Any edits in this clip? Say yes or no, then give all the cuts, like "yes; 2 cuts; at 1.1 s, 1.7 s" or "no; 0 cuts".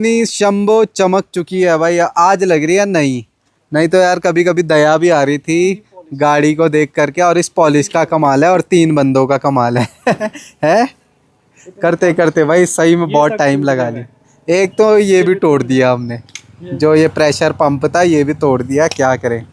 no; 0 cuts